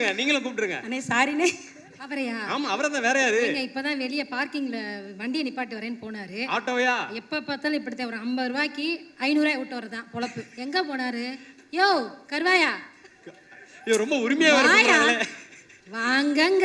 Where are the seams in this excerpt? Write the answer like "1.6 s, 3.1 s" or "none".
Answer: none